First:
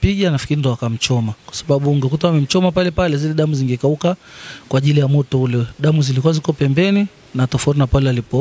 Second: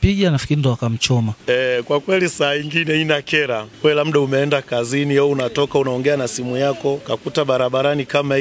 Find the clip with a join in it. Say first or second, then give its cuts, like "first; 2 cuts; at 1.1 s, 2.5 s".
second; 3 cuts; at 1.3 s, 3.7 s, 7.0 s